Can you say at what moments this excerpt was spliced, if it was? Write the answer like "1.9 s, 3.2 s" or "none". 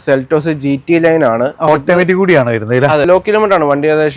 1.7 s, 3.1 s

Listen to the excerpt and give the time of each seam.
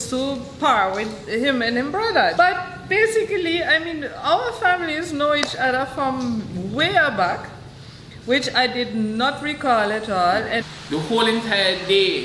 2.3 s, 10.6 s

